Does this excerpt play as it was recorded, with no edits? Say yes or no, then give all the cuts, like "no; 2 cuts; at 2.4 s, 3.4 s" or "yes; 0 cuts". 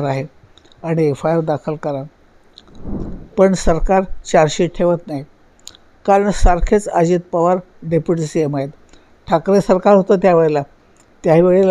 no; 1 cut; at 3.0 s